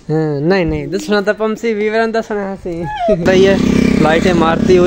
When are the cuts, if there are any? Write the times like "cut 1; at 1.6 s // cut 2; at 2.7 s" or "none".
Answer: cut 1; at 3.3 s